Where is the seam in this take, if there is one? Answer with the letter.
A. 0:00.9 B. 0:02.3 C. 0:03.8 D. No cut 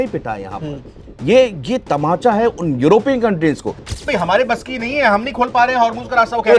C